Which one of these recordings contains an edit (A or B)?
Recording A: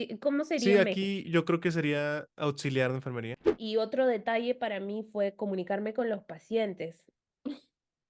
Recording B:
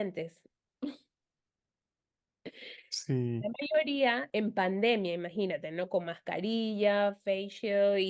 A